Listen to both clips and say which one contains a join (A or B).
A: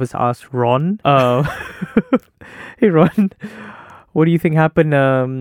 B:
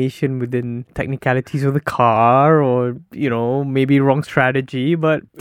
A